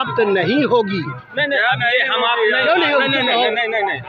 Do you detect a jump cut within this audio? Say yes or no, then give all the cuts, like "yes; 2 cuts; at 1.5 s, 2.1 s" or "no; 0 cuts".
no; 0 cuts